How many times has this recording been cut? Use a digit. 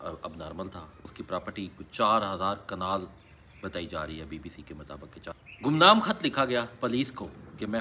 2